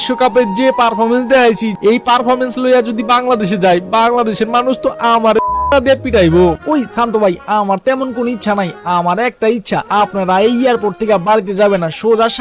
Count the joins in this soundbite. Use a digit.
2